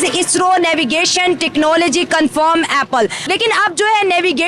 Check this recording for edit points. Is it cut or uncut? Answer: cut